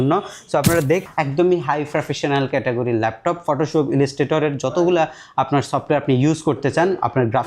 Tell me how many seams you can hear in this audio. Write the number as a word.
one